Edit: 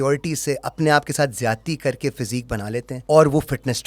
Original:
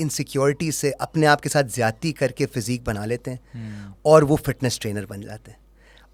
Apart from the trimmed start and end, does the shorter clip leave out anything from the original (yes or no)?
yes